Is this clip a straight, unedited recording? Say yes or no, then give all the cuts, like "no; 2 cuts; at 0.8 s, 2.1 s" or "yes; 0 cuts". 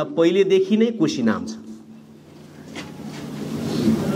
yes; 0 cuts